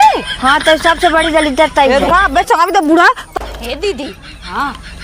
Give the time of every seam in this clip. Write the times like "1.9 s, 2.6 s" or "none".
3.2 s